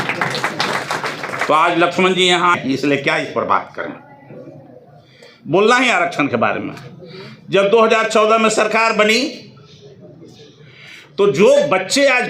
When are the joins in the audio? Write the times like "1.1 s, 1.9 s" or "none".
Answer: 2.6 s